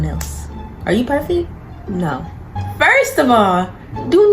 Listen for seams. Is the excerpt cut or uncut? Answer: cut